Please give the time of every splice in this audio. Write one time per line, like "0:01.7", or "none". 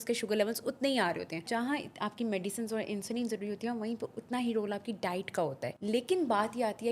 0:01.5
0:05.7